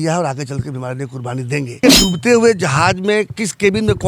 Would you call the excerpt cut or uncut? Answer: cut